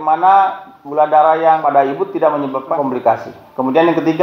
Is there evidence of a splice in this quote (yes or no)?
yes